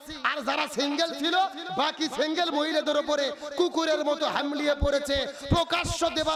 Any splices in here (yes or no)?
no